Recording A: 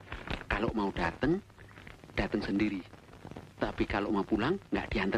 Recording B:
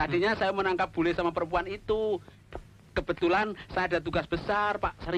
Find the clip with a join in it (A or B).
B